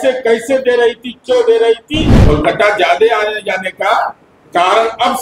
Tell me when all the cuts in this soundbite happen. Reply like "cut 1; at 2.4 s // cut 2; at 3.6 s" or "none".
cut 1; at 2.1 s